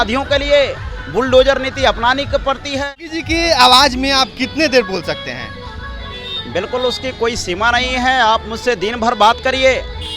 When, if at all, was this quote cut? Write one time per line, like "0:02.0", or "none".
0:02.7